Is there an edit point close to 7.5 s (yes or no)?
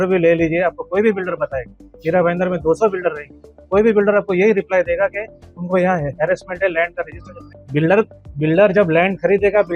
yes